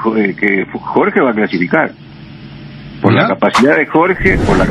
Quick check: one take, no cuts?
yes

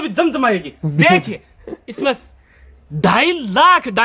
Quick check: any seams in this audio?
no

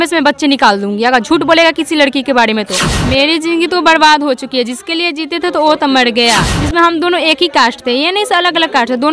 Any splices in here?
yes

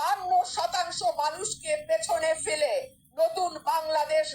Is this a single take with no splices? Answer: yes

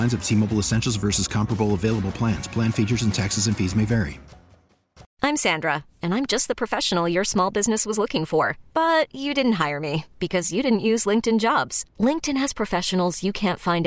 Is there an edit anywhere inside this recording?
yes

